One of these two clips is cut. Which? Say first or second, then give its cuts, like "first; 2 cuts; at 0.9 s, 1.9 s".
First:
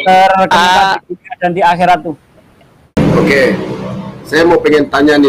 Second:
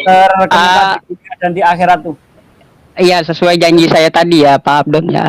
first; 1 cut; at 3.0 s